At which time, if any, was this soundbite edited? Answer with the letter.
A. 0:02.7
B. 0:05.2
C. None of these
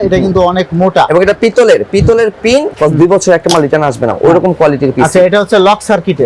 A